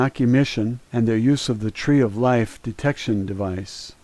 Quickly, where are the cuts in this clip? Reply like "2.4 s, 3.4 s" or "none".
none